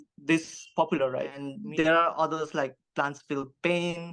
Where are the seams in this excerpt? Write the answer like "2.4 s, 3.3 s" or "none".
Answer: 1.6 s